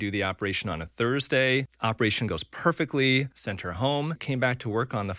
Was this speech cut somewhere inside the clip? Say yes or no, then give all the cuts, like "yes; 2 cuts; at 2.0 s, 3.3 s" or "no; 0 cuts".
yes; 3 cuts; at 1.7 s, 3.4 s, 4.2 s